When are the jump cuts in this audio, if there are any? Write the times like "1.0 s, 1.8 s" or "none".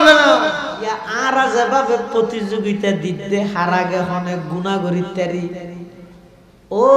1.1 s